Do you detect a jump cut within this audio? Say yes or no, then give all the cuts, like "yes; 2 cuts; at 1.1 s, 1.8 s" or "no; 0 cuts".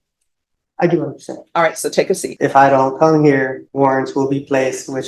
yes; 2 cuts; at 2.3 s, 3.6 s